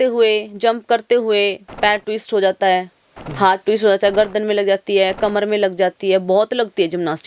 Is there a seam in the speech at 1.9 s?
no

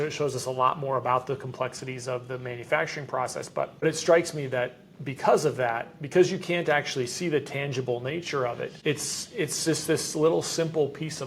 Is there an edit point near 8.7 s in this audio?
yes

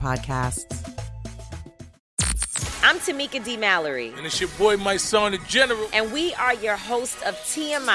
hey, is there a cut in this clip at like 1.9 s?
yes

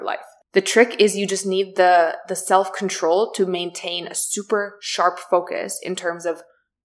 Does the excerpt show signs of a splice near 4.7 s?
no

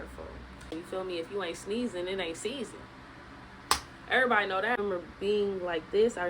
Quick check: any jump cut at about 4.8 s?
yes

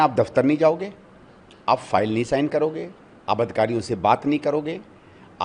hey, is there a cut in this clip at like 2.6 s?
no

